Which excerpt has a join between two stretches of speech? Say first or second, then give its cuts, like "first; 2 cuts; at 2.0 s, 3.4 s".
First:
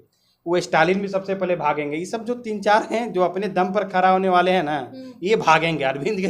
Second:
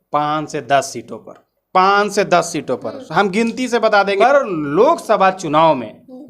second; 1 cut; at 4.2 s